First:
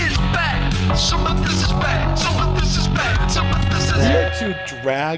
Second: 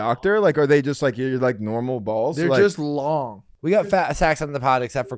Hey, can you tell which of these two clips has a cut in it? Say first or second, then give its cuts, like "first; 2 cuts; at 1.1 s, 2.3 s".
second; 1 cut; at 3.4 s